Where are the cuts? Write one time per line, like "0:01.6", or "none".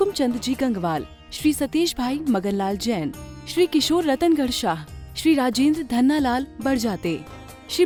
none